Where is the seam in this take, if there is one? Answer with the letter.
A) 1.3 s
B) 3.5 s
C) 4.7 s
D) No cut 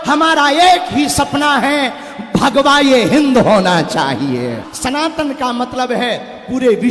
C